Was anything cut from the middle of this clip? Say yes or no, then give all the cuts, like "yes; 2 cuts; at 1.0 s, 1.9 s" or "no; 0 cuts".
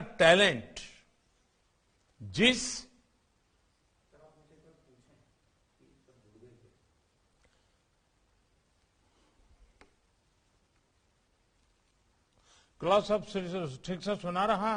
no; 0 cuts